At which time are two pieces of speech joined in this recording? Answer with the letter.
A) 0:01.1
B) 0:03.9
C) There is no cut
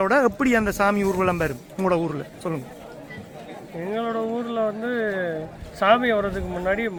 C